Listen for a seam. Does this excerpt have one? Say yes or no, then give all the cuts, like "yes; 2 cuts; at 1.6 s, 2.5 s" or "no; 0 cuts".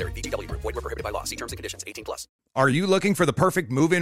yes; 1 cut; at 2.3 s